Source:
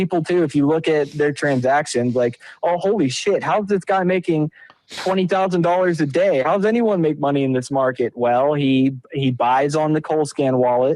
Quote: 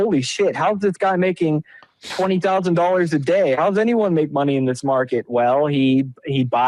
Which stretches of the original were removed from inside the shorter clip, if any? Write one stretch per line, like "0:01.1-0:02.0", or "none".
none